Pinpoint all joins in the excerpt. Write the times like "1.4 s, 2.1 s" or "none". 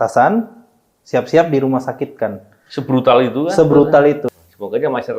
4.3 s